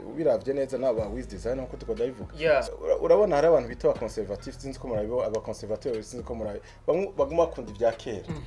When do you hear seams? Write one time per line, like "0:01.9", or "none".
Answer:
0:02.7